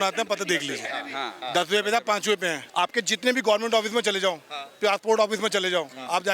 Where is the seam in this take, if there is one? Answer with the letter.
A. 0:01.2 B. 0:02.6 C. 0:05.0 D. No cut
B